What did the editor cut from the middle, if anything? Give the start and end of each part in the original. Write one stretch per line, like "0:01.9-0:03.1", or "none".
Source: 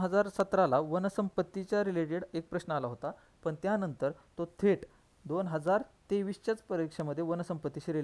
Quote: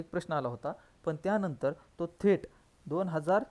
none

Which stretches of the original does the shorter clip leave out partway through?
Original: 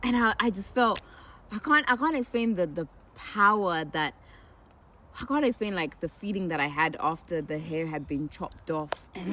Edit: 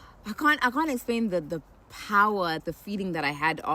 0:03.9-0:06.0

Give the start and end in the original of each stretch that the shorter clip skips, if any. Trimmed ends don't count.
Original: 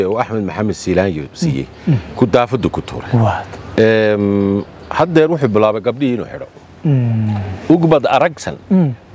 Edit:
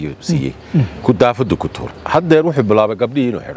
0:03.0-0:04.7

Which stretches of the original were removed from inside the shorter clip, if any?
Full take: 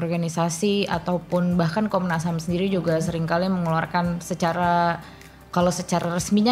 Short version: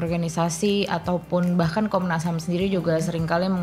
none

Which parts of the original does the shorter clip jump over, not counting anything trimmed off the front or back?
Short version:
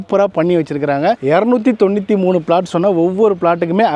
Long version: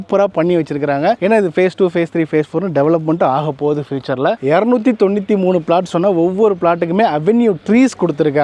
0:01.2-0:04.4

